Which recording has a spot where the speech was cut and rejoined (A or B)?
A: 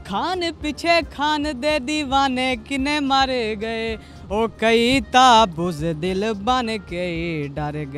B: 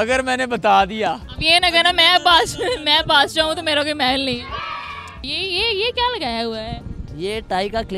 B